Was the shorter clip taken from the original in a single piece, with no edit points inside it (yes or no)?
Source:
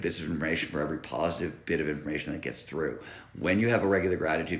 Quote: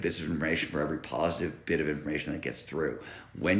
yes